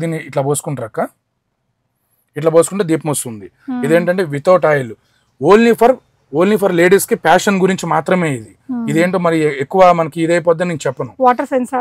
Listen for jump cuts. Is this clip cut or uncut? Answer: uncut